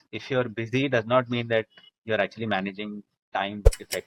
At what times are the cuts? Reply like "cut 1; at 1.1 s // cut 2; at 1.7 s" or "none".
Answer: none